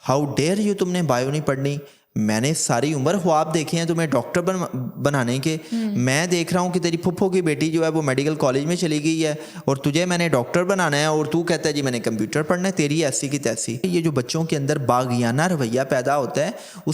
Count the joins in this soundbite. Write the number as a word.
one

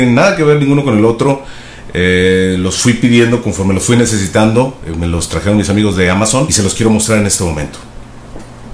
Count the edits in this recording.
zero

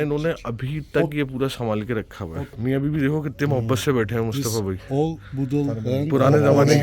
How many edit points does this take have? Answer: one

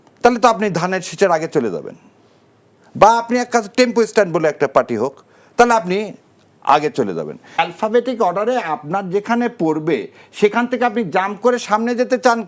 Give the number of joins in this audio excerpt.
one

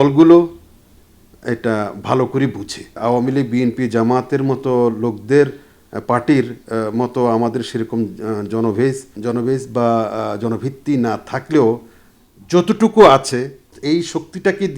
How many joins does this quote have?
three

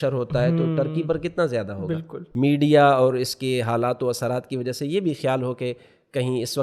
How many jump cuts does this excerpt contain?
one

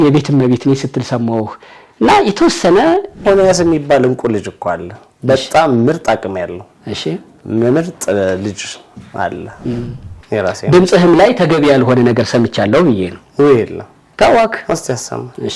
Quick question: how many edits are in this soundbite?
two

